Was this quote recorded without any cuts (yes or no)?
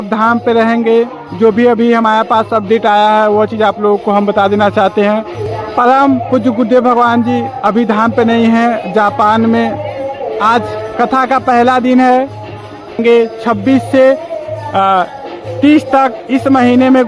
no